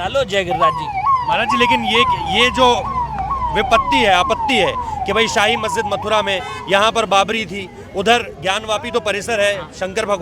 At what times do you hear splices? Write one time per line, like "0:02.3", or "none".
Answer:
none